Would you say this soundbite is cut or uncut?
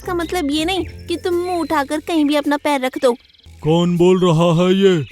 cut